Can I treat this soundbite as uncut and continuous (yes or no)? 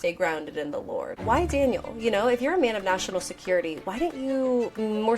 no